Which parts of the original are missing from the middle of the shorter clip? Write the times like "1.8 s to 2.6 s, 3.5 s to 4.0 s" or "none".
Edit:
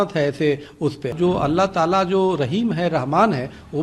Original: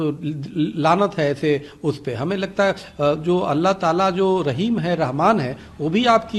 2.2 s to 3.2 s